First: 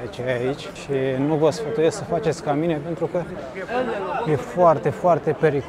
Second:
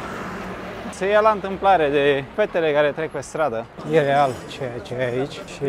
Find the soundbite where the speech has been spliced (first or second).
second